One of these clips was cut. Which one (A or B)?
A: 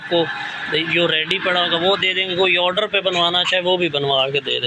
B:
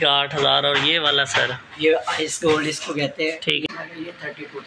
B